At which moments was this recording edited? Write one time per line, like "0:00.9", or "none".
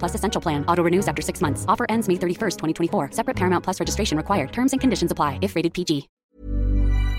0:06.1